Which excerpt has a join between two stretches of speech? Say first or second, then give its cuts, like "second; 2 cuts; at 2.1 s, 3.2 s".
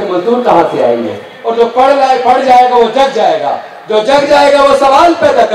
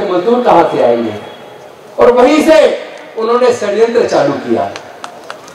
first; 1 cut; at 1.4 s